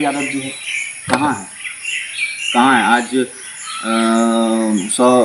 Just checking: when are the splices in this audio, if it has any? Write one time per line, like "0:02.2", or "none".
none